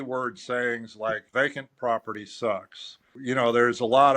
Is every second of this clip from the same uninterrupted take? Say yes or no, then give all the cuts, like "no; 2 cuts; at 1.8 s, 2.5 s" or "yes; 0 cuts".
no; 2 cuts; at 1.2 s, 3.1 s